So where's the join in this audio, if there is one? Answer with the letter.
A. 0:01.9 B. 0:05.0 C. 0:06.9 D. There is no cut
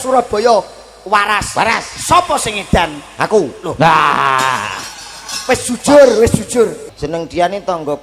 C